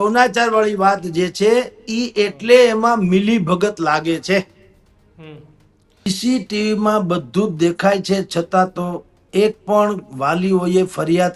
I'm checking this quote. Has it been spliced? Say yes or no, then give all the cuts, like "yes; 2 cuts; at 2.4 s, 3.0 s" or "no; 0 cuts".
yes; 1 cut; at 6.1 s